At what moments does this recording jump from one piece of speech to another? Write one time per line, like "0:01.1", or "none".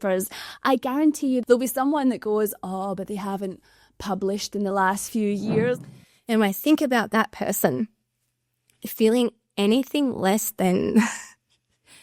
0:01.4
0:05.8